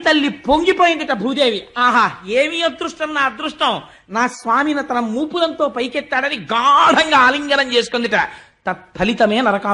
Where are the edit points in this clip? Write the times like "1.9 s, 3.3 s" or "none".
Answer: none